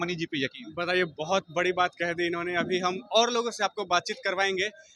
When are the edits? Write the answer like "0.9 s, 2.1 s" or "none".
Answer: none